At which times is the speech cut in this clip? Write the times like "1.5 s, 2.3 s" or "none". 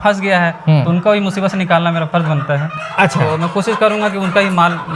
none